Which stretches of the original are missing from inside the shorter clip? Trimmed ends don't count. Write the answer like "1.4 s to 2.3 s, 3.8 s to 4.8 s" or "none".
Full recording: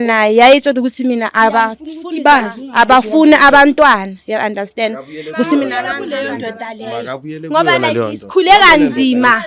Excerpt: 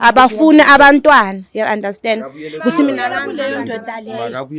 none